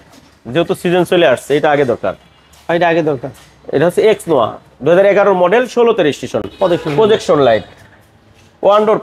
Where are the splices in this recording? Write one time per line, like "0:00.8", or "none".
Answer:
none